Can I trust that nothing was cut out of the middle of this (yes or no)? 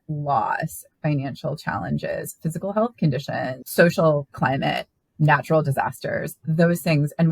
no